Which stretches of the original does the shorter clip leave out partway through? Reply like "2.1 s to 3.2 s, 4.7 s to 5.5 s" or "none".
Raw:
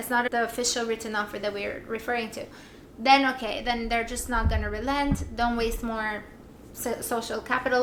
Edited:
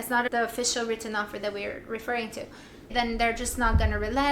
2.9 s to 3.6 s